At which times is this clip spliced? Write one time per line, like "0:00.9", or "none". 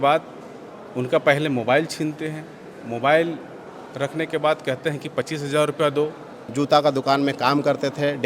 0:06.5